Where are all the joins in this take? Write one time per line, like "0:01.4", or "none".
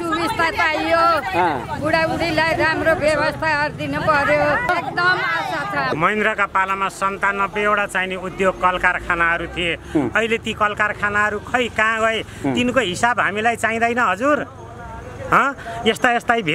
0:04.7
0:05.9